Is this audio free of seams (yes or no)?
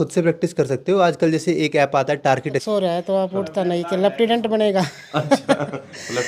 no